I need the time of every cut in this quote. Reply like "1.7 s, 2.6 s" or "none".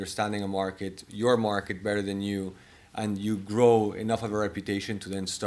none